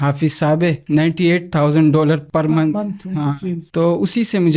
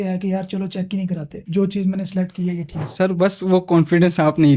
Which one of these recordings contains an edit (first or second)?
first